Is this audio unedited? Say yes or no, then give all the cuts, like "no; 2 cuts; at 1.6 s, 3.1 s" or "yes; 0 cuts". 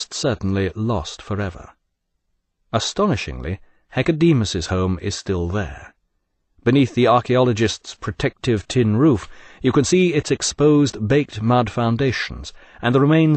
yes; 0 cuts